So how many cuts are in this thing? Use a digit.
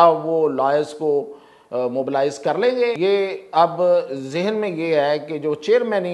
1